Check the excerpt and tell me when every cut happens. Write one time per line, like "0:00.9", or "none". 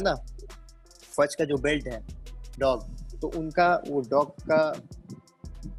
none